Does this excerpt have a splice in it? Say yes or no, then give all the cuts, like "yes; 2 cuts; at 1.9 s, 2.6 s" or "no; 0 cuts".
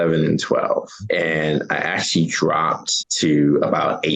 no; 0 cuts